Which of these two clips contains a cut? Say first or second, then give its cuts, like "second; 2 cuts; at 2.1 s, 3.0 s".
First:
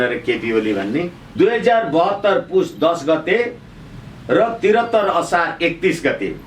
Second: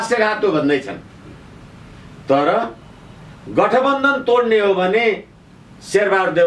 first; 1 cut; at 1.2 s